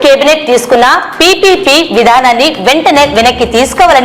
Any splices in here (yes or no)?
no